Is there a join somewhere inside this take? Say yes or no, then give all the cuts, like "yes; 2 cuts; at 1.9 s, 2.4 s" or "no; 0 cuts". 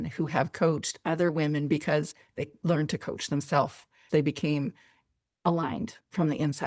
no; 0 cuts